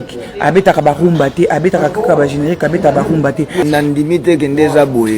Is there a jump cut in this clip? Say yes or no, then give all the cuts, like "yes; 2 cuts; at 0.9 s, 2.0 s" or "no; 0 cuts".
yes; 1 cut; at 3.6 s